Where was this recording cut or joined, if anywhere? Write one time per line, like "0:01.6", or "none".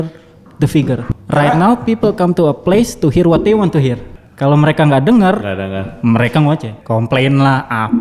0:01.1
0:04.1
0:06.7

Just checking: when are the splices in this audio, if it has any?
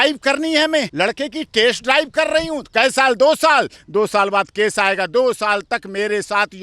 0:00.9

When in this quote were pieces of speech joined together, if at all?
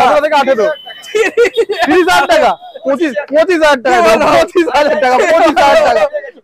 none

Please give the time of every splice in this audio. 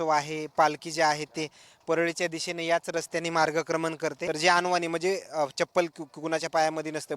0:04.2

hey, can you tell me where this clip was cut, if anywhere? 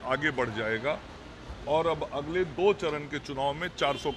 0:02.8

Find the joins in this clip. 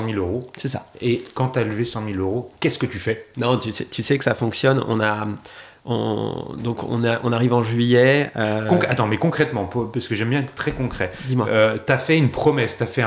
0:01.3
0:03.3

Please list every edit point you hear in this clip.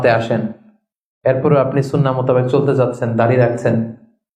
none

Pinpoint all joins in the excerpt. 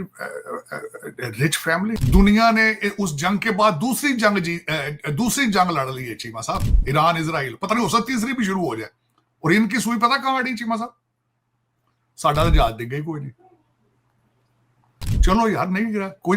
0:02.0

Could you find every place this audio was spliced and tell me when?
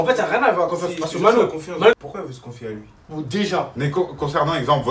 0:01.9

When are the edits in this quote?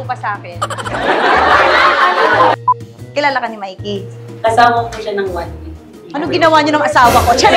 0:02.5

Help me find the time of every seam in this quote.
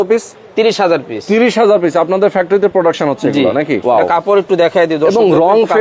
0:03.8

